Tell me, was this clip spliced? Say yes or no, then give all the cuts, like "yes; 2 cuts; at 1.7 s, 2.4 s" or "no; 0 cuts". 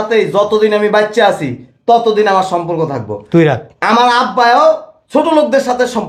no; 0 cuts